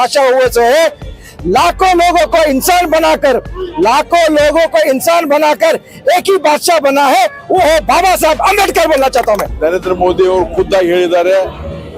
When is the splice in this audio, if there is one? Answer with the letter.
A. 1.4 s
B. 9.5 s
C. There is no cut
B